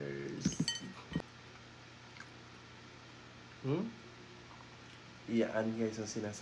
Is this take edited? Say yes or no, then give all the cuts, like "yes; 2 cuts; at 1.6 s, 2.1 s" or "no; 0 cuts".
yes; 1 cut; at 1.2 s